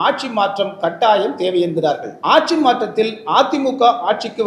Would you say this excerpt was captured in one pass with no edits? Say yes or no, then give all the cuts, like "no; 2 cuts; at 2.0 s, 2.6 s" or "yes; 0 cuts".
no; 1 cut; at 2.1 s